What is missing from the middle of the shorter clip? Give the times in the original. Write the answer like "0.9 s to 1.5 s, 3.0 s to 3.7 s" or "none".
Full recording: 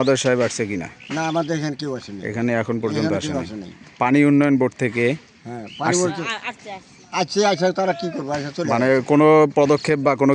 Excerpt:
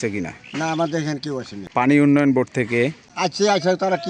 2.1 s to 3.8 s, 5.3 s to 7.0 s